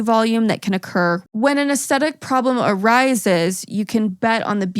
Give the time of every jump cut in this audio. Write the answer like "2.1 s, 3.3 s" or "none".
1.2 s

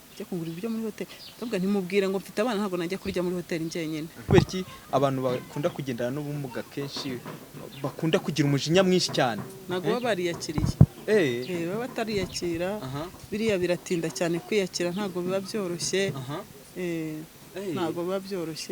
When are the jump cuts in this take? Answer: 4.2 s

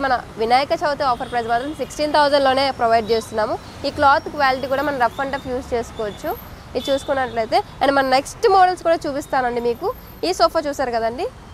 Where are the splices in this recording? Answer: none

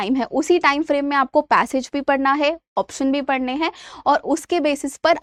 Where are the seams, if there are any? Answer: none

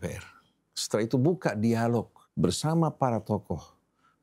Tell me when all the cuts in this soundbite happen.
2.2 s

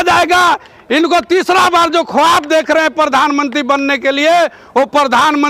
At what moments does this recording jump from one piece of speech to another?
none

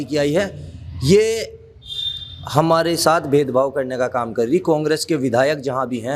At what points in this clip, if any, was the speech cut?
none

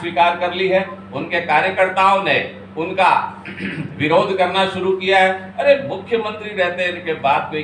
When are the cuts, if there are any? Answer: none

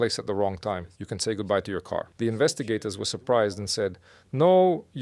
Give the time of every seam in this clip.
2.1 s

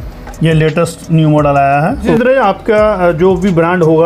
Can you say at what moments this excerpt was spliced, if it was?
2.2 s

